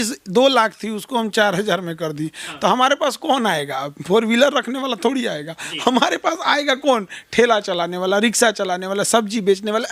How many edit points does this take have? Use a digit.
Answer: 0